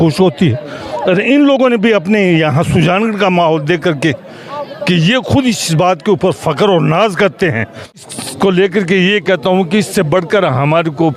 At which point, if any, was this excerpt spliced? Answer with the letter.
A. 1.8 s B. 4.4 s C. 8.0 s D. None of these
C